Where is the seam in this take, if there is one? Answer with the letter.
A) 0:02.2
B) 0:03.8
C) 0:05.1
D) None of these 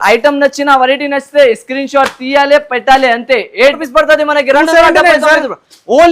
B